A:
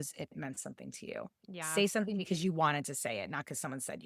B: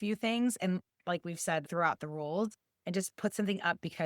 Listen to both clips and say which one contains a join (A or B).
B